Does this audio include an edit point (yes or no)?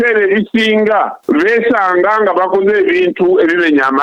yes